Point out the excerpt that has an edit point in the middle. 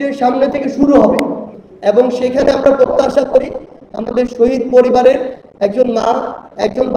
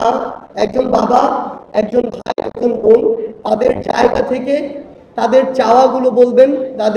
first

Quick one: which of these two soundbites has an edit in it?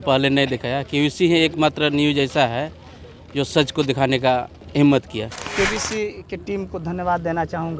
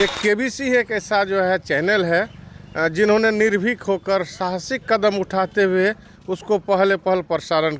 first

